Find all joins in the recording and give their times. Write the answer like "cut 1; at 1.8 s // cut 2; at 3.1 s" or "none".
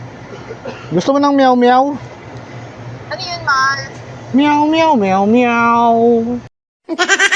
cut 1; at 6.5 s